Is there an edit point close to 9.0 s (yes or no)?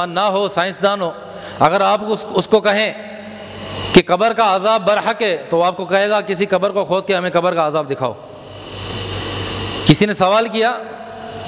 yes